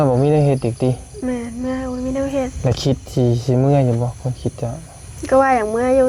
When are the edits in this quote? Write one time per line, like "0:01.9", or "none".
none